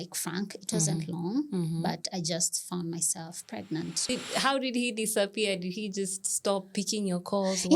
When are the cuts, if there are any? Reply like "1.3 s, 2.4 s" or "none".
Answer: 4.1 s